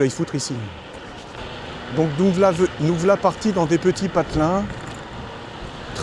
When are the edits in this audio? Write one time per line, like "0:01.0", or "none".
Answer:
0:01.4